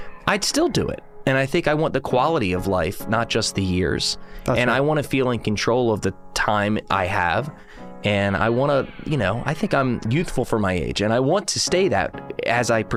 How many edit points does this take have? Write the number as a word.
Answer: zero